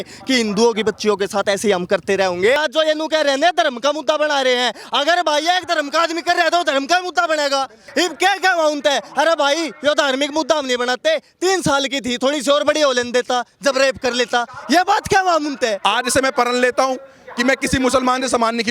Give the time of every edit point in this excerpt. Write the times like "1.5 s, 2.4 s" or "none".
2.6 s, 7.8 s, 15.8 s